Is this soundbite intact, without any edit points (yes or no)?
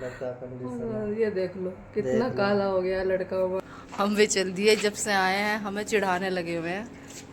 no